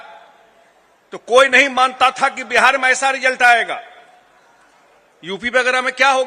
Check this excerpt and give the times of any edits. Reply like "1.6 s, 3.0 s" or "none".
none